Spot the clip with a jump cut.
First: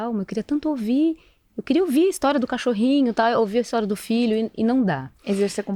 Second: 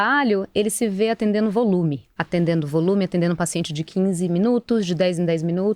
second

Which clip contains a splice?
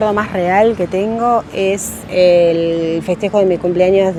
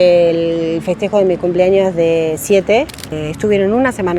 second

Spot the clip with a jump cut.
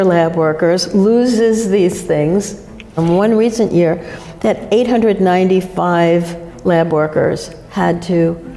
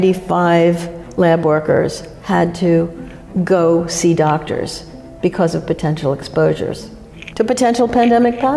first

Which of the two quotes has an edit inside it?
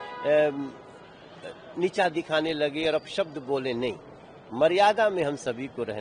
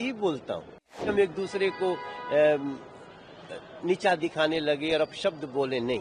second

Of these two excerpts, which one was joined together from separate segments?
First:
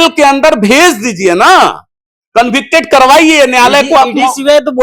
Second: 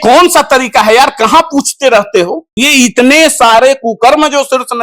second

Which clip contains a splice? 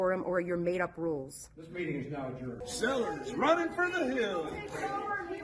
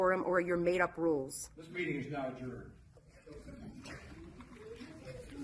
first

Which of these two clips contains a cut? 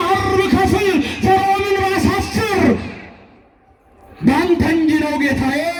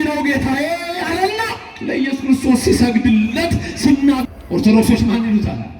second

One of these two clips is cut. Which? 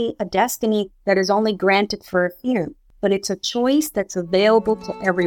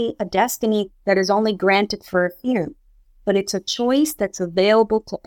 first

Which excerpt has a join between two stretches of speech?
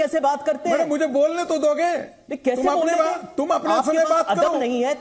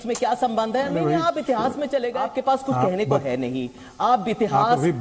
second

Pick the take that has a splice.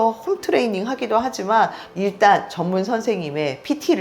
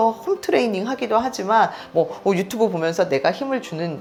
first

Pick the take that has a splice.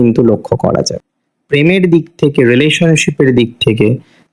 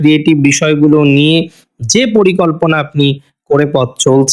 first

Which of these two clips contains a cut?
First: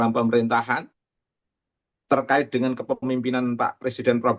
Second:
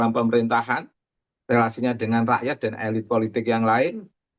first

